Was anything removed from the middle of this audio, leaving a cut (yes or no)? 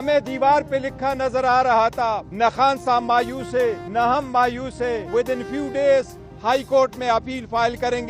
yes